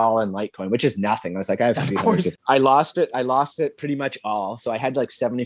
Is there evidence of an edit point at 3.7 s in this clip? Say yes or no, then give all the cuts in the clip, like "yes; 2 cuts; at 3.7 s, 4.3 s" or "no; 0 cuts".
no; 1 cut; at 2.3 s